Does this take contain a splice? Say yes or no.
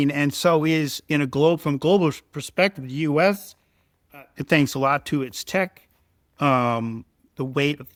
no